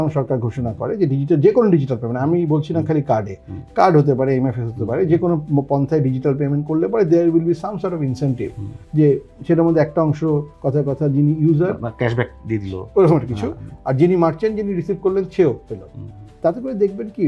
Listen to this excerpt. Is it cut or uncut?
uncut